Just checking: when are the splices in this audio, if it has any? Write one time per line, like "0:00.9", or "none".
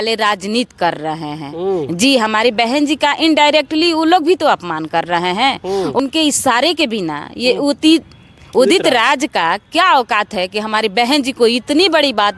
0:06.0

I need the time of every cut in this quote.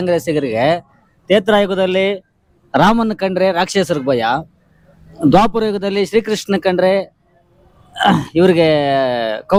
none

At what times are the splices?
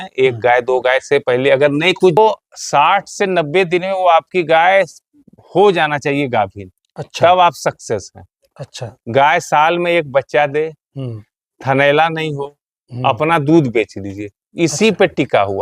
0:02.2

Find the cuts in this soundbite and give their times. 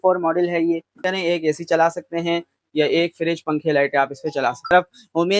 0:01.0
0:04.7

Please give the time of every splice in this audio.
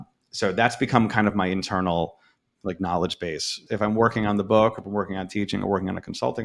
0:03.6

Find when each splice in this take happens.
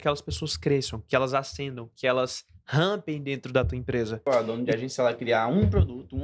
0:04.3

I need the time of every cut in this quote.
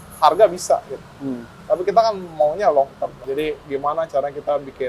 0:03.2

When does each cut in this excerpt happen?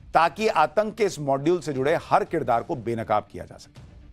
0:02.6

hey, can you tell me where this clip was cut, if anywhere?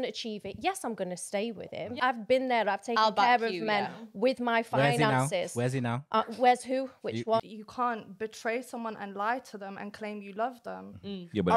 0:02.0
0:07.5

